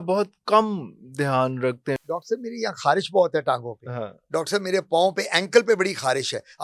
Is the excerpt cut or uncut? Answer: cut